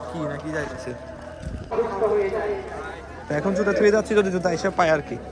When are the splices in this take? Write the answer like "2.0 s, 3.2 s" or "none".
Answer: 1.7 s, 3.3 s